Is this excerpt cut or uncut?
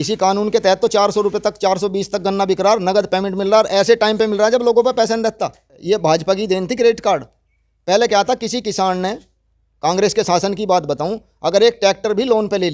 cut